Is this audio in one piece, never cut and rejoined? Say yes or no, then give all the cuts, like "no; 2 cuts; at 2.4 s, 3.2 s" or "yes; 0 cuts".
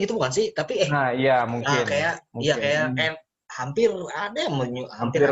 yes; 0 cuts